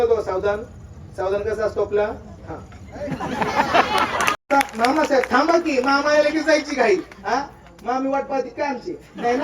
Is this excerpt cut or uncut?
cut